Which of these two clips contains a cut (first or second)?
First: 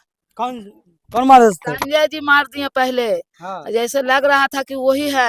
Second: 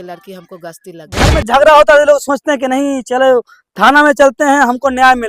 second